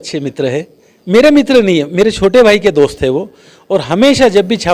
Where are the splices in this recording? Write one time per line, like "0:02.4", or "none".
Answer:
none

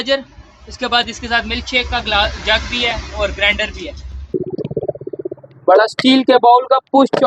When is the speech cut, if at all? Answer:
0:04.3

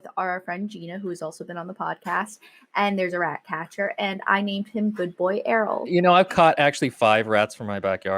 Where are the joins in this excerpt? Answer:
0:05.8

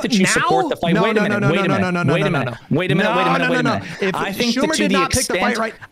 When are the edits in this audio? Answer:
none

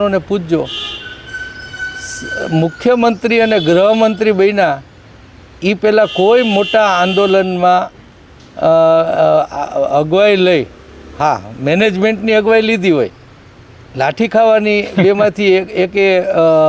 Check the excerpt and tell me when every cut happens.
none

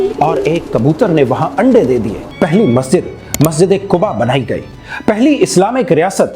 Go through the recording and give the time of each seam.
0:02.2

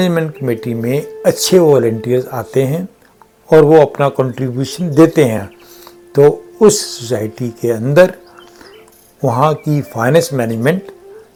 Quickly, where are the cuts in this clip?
none

